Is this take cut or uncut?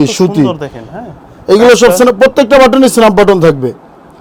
uncut